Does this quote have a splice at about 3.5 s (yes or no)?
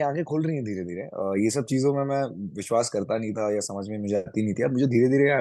no